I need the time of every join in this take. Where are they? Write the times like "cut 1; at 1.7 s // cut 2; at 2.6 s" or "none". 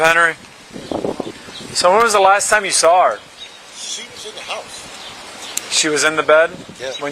cut 1; at 1.4 s // cut 2; at 5.5 s